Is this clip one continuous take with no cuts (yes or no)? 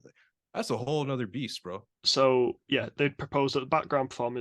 no